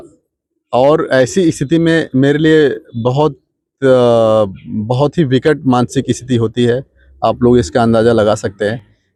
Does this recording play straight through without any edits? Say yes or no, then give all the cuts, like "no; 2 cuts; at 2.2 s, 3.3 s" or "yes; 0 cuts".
yes; 0 cuts